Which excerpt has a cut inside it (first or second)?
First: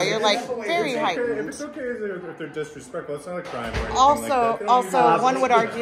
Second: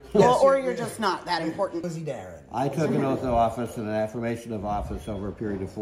second